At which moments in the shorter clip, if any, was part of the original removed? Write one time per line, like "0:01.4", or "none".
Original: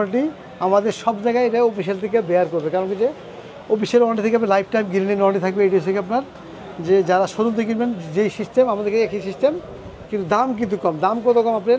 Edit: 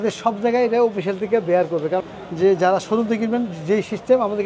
0:02.1